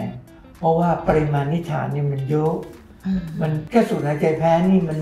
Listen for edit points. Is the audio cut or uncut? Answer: uncut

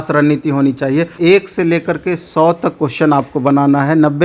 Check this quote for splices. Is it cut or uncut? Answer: cut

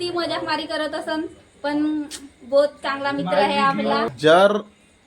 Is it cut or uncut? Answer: cut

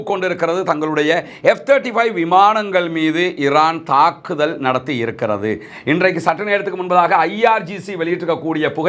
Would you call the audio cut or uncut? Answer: uncut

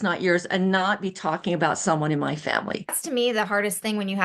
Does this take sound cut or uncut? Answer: cut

